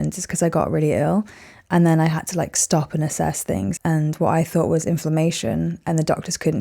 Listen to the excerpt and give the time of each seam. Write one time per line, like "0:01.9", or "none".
0:03.8